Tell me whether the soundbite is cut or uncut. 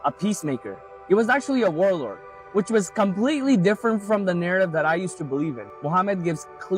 cut